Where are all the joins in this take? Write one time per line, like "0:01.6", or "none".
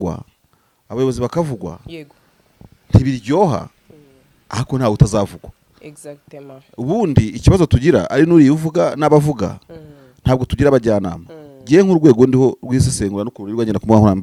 none